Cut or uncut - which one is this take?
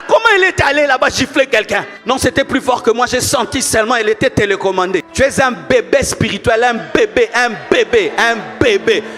cut